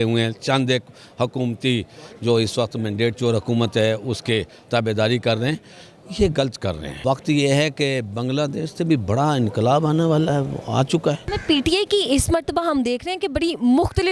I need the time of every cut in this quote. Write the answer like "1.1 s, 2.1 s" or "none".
6.9 s, 11.3 s